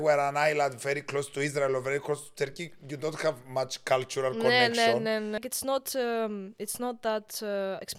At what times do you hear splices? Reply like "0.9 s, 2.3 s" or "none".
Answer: 5.4 s